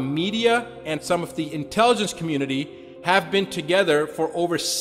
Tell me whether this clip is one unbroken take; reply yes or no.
no